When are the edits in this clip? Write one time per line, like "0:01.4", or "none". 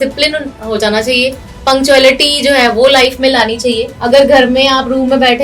0:03.9